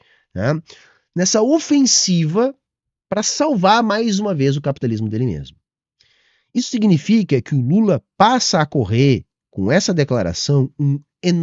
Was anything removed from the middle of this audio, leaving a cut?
no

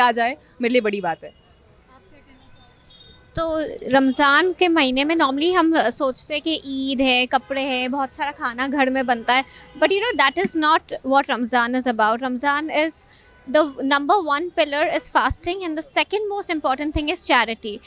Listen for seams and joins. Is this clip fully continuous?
yes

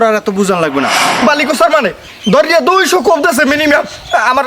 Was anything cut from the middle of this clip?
yes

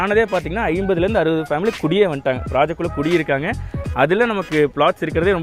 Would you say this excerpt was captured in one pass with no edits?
yes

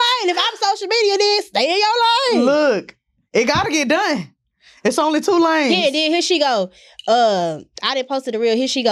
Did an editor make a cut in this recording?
no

